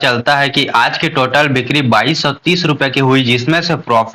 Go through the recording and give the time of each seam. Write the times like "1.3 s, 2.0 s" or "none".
none